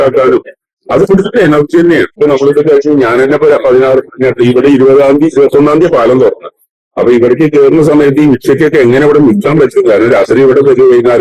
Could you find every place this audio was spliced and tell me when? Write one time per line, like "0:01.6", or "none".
0:02.2